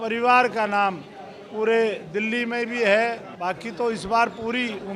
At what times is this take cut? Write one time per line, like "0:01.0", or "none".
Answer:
0:03.3